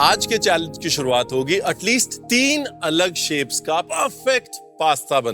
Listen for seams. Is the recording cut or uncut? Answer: cut